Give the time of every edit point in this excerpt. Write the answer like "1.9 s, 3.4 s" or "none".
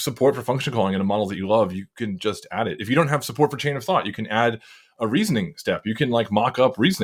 none